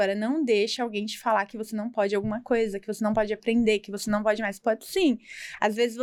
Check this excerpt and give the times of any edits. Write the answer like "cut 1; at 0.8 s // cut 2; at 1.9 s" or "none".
none

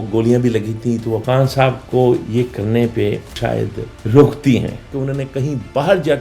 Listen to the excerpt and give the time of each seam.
cut 1; at 1.2 s // cut 2; at 5.0 s

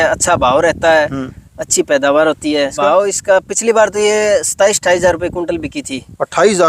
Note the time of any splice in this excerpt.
cut 1; at 2.8 s

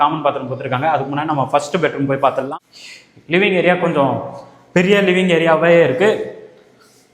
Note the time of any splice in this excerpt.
cut 1; at 2.5 s

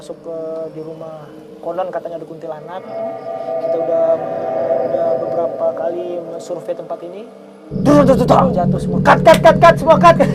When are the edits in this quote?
none

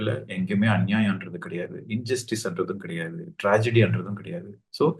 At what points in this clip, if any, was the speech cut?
none

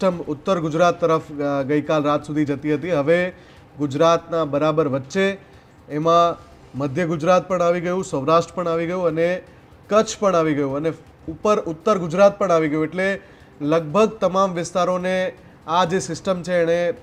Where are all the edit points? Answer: none

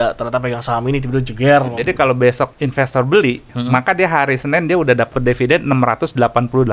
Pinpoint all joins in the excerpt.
cut 1; at 1.8 s // cut 2; at 2.5 s // cut 3; at 3.5 s // cut 4; at 5.1 s

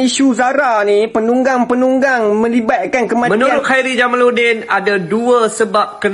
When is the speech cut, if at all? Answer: cut 1; at 3.3 s

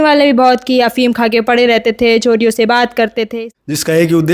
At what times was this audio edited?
cut 1; at 3.3 s

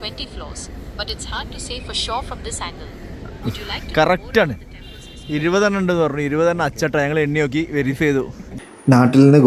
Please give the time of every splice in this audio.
cut 1; at 8.4 s

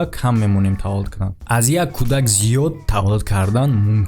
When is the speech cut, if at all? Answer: cut 1; at 1.4 s

